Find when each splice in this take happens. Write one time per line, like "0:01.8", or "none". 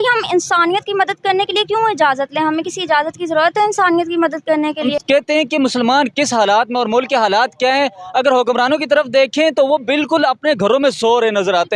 0:04.9